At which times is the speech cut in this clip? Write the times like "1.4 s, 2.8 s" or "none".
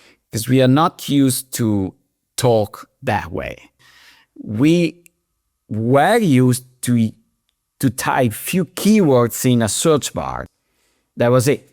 3.8 s, 10.4 s